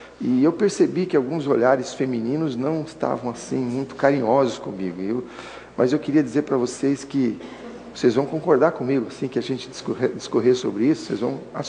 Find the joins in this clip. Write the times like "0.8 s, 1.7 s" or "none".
10.2 s